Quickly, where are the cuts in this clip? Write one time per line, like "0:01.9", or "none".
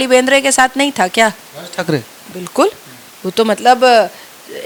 none